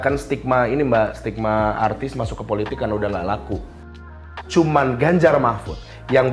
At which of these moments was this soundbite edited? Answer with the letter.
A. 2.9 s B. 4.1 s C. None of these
B